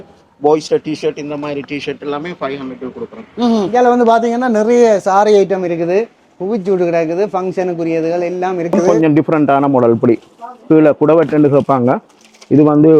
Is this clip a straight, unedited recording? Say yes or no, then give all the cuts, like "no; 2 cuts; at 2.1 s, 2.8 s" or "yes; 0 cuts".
no; 2 cuts; at 3.7 s, 8.8 s